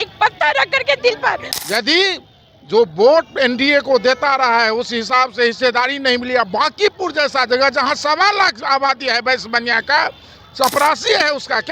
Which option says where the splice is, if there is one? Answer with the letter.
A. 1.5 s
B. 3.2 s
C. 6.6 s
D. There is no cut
A